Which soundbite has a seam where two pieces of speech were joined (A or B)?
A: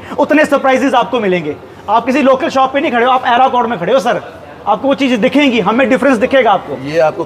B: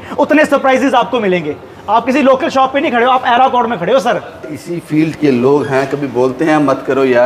B